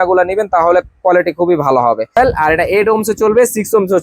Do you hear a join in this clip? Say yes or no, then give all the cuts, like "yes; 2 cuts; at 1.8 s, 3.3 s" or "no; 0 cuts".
yes; 1 cut; at 2.2 s